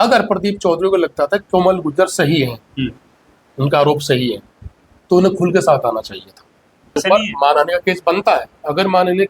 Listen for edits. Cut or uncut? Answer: cut